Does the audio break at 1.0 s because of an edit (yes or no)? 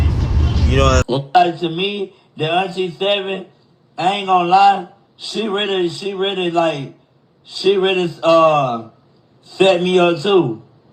yes